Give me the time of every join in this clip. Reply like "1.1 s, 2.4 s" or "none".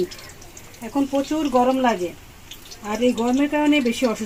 none

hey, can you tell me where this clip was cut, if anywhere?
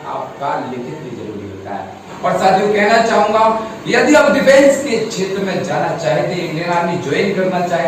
2.1 s

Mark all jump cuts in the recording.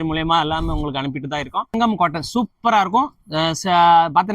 1.7 s

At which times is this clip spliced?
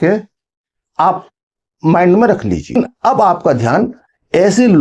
2.8 s

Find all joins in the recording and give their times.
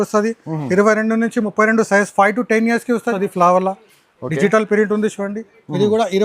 3.1 s

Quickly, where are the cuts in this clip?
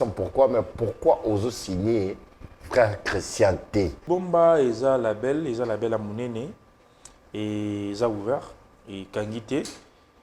4.0 s

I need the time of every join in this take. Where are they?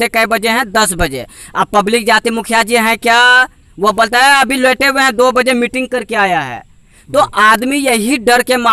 none

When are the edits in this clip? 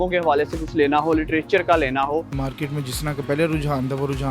2.3 s

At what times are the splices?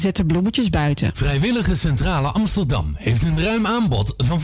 1.2 s

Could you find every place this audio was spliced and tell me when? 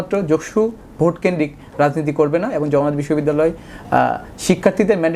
none

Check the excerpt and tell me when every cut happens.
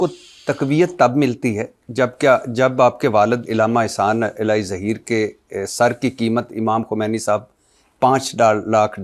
none

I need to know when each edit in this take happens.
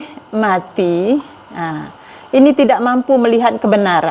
none

